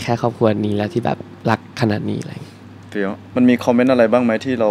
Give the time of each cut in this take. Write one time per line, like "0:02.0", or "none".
0:03.2